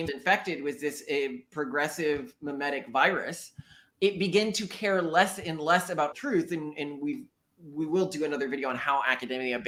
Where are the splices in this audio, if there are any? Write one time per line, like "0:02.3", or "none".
none